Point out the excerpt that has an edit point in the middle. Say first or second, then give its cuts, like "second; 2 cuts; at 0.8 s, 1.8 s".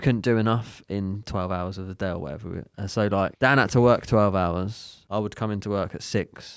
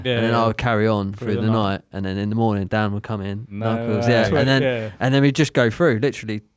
first; 3 cuts; at 1.2 s, 3.3 s, 4.9 s